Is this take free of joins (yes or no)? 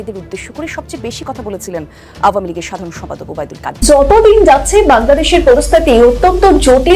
no